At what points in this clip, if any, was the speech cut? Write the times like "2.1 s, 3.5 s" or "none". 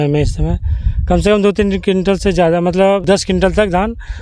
3.0 s